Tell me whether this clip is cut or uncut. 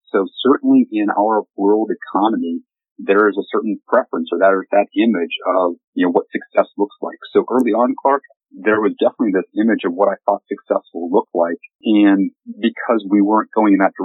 cut